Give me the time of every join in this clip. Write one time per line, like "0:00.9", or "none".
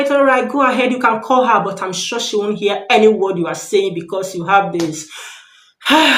none